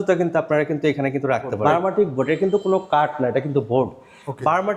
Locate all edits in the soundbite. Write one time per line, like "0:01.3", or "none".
0:01.6